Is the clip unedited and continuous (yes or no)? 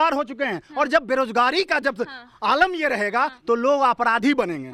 yes